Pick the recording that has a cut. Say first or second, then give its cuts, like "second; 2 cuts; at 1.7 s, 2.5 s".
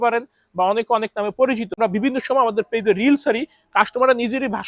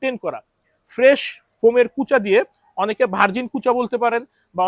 first; 1 cut; at 1.8 s